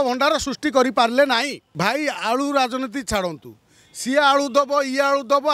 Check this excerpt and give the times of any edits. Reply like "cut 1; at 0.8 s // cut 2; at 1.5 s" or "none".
cut 1; at 1.6 s